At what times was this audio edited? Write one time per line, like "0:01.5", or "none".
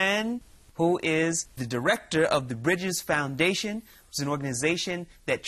none